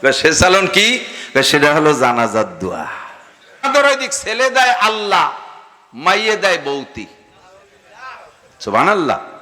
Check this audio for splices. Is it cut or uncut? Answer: cut